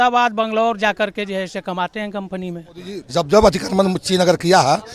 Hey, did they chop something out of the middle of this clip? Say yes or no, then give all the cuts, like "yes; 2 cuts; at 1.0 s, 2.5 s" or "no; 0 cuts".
yes; 1 cut; at 3.0 s